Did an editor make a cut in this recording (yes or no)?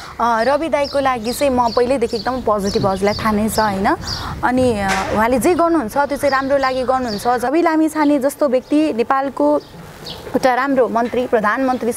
yes